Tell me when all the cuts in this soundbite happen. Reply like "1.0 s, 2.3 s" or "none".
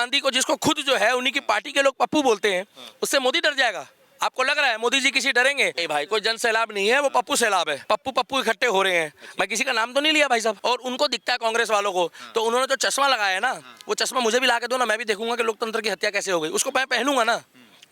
5.8 s, 7.8 s, 10.6 s